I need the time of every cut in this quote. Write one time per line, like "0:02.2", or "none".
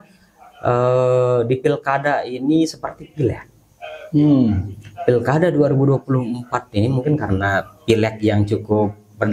none